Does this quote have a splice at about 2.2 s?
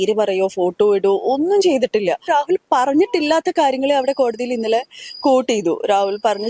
yes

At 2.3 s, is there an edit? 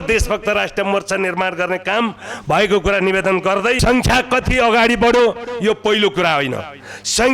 no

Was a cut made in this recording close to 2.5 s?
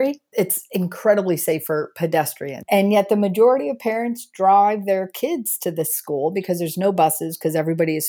yes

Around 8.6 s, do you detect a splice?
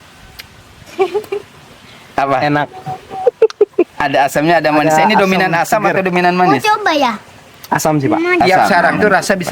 yes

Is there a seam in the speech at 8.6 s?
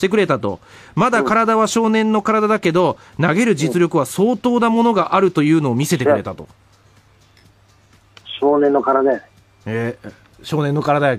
yes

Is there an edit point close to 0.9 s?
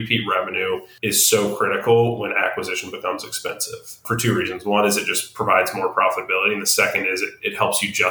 yes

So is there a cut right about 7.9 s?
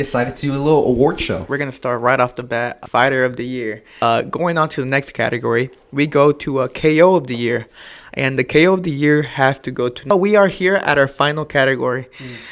no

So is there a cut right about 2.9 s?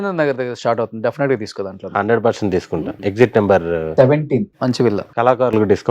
yes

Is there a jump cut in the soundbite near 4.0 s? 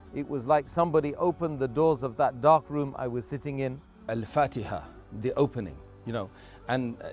yes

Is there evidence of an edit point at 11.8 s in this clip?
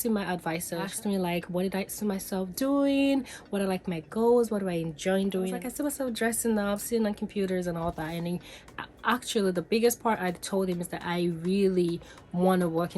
no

